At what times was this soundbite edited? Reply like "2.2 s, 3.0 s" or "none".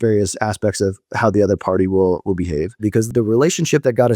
3.1 s